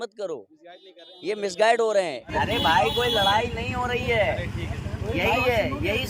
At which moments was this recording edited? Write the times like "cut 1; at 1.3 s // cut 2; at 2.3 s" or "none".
cut 1; at 2.2 s